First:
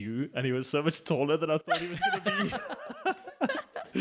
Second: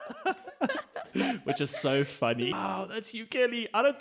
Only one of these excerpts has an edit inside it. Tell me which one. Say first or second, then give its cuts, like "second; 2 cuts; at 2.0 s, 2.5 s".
second; 1 cut; at 2.5 s